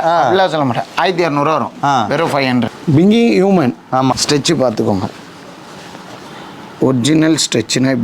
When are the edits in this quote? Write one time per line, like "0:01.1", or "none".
0:02.8
0:04.1